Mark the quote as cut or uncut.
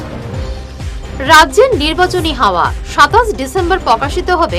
cut